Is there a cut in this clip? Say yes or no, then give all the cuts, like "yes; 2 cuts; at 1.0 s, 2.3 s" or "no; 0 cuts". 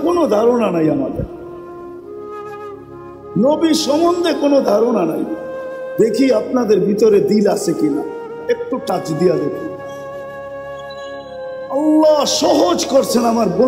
yes; 2 cuts; at 10.0 s, 11.3 s